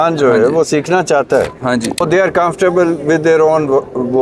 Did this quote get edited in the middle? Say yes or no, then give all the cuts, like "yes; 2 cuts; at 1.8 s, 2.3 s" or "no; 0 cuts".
yes; 1 cut; at 2.0 s